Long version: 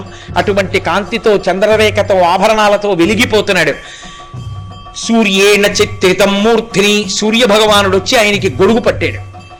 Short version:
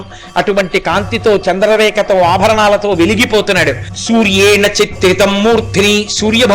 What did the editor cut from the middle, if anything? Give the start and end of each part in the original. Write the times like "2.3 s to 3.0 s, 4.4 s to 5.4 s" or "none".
3.9 s to 4.9 s